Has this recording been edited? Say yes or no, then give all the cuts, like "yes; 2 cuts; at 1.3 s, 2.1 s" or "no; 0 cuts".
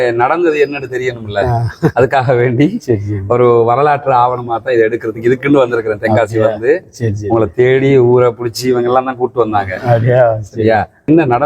no; 0 cuts